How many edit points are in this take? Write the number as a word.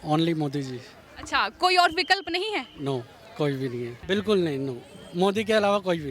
one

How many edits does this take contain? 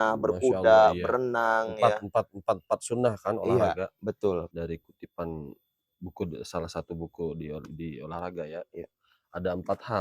one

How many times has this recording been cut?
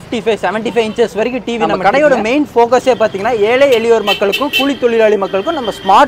one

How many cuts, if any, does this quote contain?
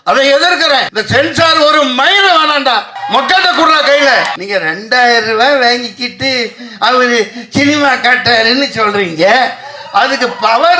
three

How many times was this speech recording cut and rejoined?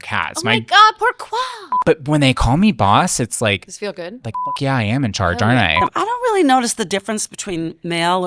two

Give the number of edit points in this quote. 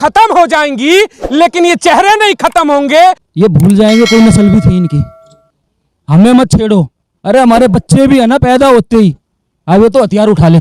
one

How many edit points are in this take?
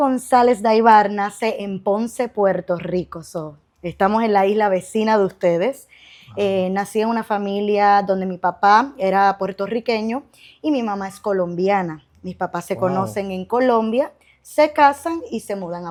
zero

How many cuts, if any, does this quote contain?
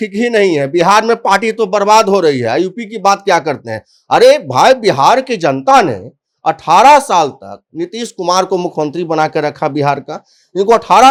zero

